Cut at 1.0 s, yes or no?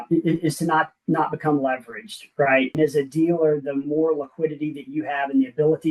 no